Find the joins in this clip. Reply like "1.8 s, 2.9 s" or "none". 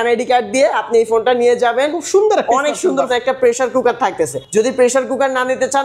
3.1 s, 4.4 s